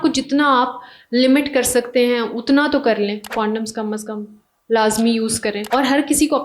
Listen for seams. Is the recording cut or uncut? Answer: cut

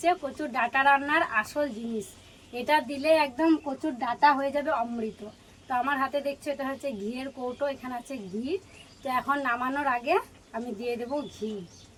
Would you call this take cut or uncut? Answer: uncut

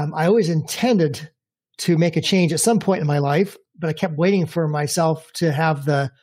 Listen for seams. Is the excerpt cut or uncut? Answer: cut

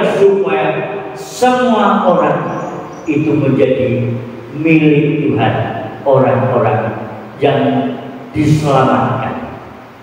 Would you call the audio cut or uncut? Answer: uncut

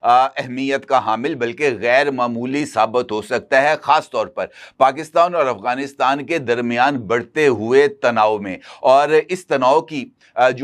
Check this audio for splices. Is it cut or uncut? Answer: uncut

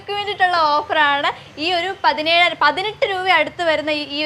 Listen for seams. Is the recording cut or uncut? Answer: uncut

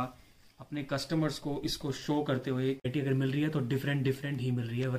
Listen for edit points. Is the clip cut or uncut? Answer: cut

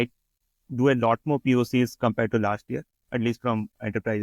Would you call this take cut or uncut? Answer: uncut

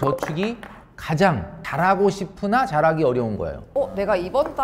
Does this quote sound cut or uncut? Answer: cut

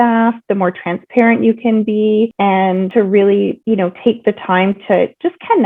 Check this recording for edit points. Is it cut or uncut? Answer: cut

